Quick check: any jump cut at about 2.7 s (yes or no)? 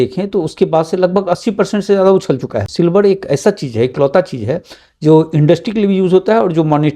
yes